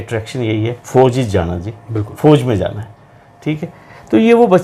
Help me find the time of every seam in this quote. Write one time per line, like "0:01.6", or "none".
none